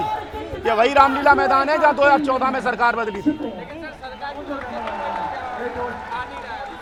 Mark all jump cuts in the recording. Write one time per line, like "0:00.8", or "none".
none